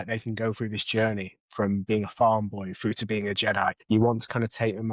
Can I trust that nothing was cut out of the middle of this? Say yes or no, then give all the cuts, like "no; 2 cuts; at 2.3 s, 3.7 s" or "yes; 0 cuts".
no; 1 cut; at 3.8 s